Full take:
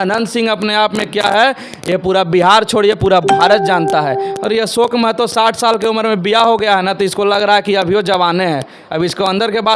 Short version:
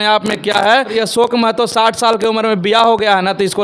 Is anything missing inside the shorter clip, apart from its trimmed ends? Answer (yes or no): yes